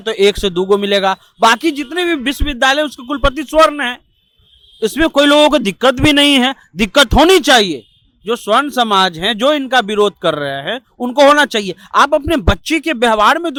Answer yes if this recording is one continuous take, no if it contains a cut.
yes